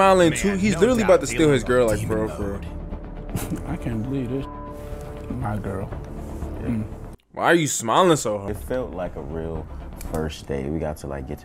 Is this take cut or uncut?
cut